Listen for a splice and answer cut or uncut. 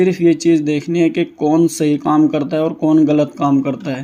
uncut